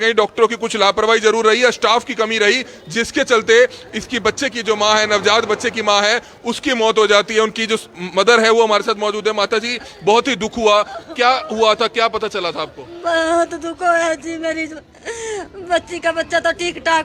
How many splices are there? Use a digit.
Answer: 0